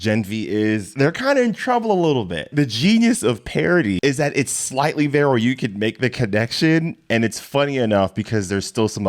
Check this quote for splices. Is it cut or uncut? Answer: cut